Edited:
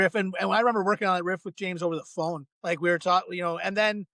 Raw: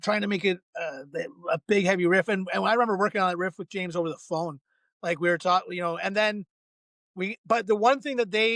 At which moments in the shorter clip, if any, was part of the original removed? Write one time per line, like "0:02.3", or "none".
0:02.5